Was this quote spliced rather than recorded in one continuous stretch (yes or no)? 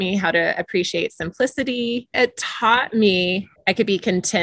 yes